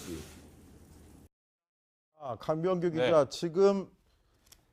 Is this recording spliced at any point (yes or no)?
yes